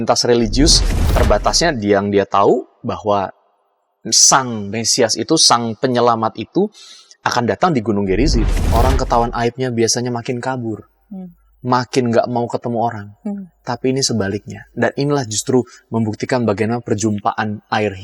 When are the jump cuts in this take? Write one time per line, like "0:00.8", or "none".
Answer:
0:01.0
0:08.6